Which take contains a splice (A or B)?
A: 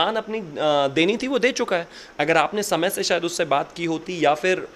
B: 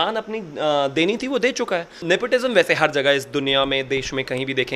B